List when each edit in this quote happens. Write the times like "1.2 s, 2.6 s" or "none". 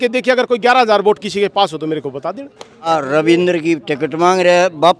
2.9 s